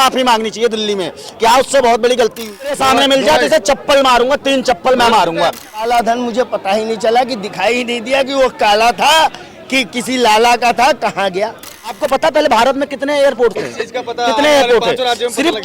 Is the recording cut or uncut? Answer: cut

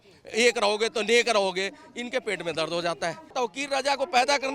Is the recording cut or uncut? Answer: cut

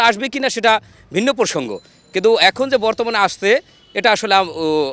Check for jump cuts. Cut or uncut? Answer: uncut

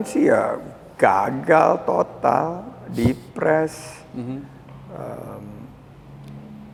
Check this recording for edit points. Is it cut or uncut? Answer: uncut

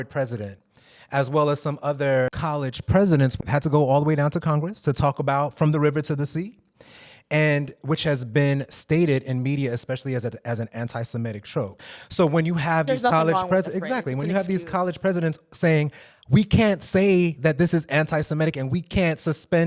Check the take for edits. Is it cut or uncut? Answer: cut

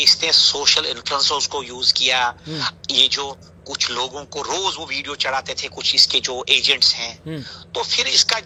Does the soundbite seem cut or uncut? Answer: uncut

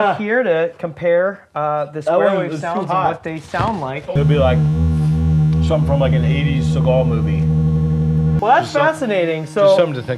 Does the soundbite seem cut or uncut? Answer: cut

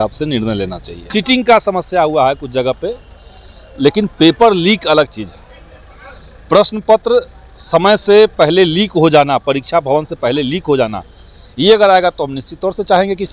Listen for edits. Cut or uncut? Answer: cut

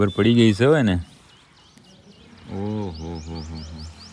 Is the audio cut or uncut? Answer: uncut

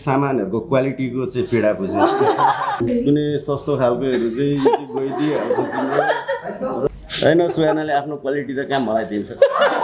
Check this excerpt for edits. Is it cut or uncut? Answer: cut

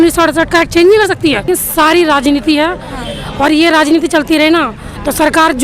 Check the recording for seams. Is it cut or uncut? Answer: cut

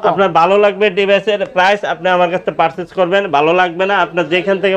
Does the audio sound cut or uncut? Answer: uncut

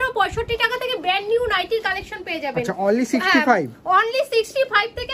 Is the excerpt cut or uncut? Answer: uncut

